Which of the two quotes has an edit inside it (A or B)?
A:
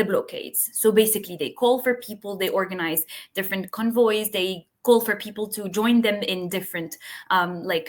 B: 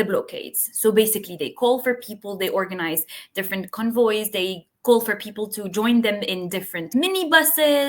B